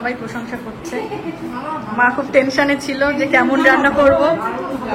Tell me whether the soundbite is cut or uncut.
uncut